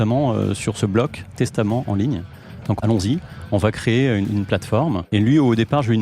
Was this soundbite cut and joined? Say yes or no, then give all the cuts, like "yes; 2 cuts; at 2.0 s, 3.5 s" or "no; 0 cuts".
yes; 2 cuts; at 2.8 s, 5.0 s